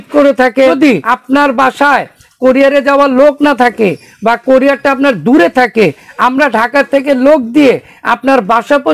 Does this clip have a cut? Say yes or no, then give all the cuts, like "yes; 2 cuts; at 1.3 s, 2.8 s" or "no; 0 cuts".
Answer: yes; 1 cut; at 0.9 s